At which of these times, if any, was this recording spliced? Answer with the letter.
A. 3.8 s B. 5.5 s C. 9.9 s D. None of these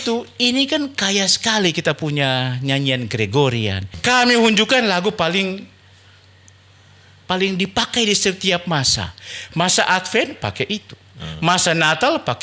A